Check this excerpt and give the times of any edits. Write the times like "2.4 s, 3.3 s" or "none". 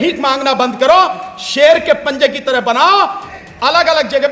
3.2 s